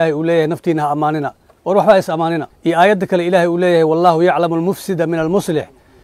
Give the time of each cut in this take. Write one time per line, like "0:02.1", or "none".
0:02.5